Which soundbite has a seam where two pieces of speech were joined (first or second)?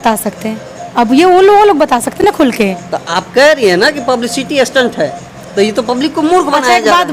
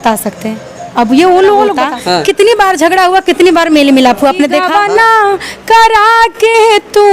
second